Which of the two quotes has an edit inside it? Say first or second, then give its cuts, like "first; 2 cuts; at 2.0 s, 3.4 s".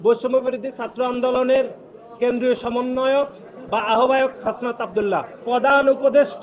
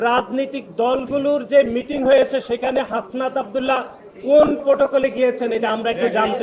first; 1 cut; at 5.4 s